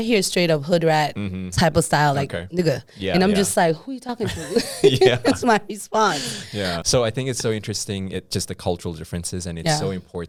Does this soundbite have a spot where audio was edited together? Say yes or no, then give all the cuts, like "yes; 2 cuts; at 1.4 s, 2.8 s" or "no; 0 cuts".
no; 0 cuts